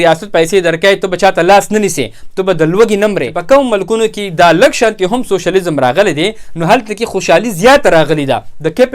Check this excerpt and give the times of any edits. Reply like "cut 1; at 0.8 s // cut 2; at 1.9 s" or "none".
cut 1; at 3.3 s